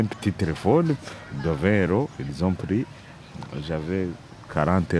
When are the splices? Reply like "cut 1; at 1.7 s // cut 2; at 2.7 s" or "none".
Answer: none